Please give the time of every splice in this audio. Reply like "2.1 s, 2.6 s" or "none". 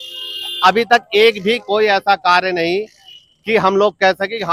none